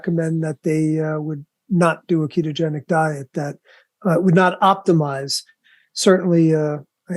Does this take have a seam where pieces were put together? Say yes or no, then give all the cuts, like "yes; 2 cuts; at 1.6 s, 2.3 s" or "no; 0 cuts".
no; 0 cuts